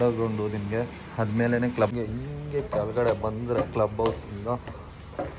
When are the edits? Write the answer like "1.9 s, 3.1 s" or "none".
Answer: 1.9 s

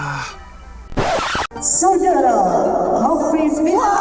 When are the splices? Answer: 1.0 s

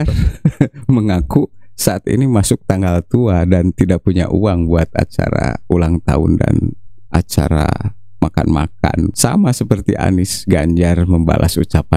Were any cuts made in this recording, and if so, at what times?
none

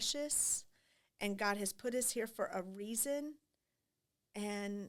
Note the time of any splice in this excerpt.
none

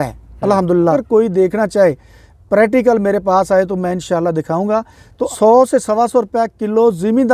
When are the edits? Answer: 0.9 s, 5.3 s

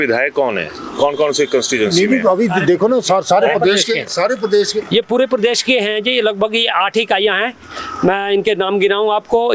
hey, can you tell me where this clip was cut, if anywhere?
none

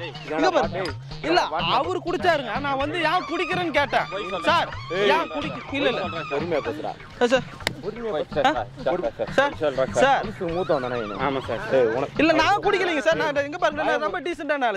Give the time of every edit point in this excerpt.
none

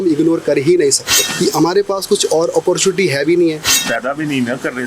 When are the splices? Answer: 1.2 s, 3.7 s

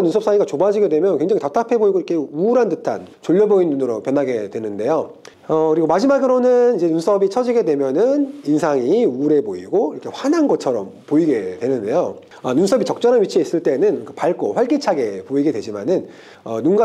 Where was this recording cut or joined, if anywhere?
5.2 s

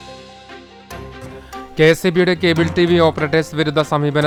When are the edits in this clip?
none

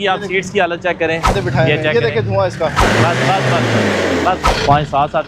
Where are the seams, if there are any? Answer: 1.3 s, 2.8 s, 4.4 s

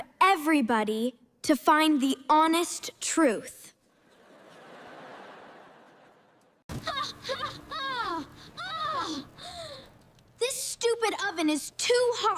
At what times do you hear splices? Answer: 6.7 s

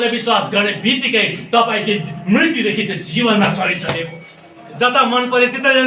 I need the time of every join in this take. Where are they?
4.7 s

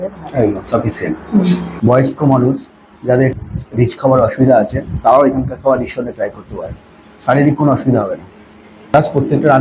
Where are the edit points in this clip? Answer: 1.7 s, 3.3 s, 8.9 s

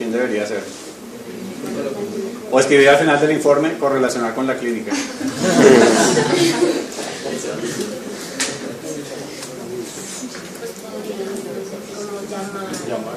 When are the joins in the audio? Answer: 7.1 s

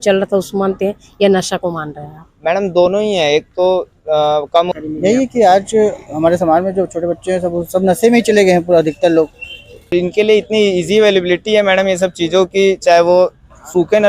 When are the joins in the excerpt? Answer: 4.7 s, 9.9 s

